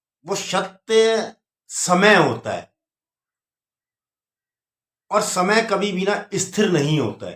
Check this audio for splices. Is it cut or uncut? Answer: uncut